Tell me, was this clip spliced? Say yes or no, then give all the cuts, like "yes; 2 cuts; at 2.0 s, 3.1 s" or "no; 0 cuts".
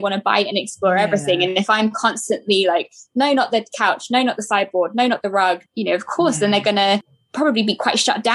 yes; 2 cuts; at 5.6 s, 7.2 s